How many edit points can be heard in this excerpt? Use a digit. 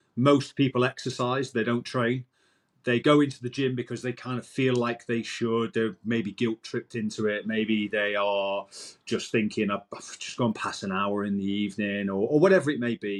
0